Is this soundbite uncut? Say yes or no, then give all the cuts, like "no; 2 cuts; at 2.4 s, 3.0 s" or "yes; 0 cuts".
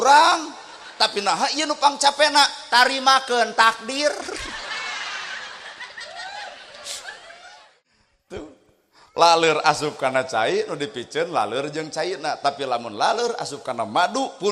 no; 1 cut; at 7.6 s